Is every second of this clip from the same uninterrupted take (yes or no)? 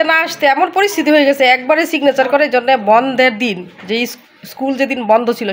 yes